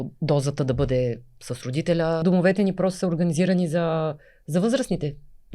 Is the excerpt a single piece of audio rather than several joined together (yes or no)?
no